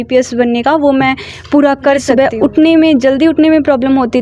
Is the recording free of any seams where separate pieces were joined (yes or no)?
no